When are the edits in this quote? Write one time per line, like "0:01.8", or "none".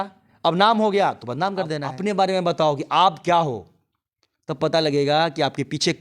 0:01.9